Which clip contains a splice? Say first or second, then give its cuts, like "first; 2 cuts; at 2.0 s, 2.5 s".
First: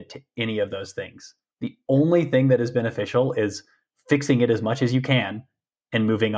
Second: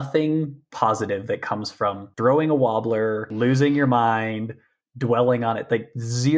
second; 2 cuts; at 2.1 s, 3.3 s